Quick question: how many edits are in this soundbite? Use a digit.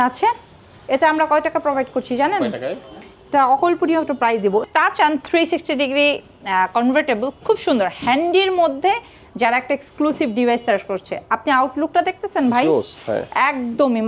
1